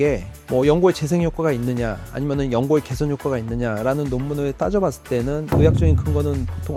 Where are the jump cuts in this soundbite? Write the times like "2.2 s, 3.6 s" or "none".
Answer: none